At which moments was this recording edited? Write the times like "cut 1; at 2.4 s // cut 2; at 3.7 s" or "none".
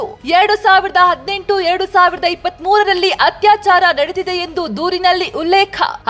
none